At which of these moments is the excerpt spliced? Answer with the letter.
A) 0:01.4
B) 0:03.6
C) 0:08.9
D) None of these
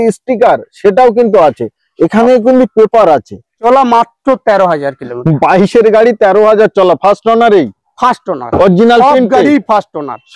B